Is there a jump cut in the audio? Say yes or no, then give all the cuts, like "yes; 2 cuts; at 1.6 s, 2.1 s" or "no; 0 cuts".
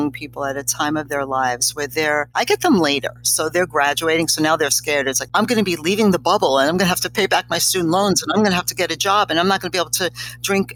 yes; 2 cuts; at 2.3 s, 5.2 s